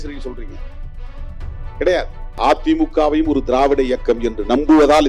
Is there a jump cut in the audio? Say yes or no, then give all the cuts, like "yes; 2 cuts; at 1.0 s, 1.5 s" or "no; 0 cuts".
yes; 1 cut; at 2.2 s